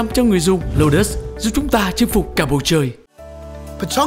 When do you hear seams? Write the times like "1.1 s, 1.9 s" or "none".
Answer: 3.0 s